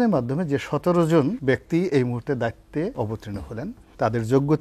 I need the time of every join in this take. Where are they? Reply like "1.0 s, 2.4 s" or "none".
1.4 s, 3.3 s